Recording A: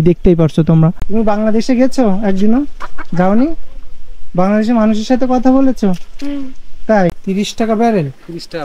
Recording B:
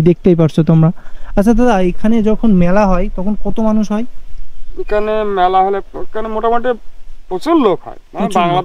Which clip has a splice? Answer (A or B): A